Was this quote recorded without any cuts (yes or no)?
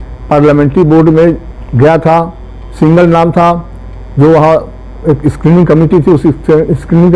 yes